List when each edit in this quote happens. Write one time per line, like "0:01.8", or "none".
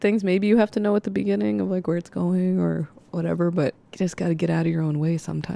0:03.8